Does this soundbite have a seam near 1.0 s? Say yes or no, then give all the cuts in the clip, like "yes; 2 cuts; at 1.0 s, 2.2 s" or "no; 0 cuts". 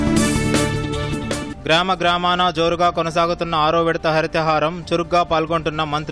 yes; 1 cut; at 1.0 s